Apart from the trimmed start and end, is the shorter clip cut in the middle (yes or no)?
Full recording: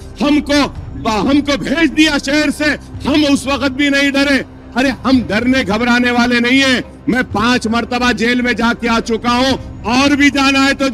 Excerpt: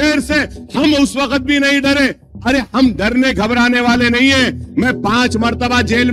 no